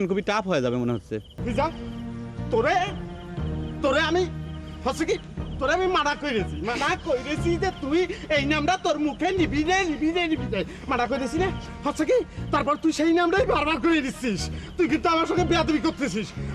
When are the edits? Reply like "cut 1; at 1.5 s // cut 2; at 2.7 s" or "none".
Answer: cut 1; at 1.3 s